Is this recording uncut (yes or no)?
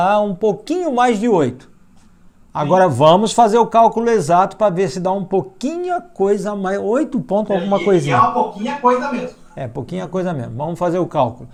yes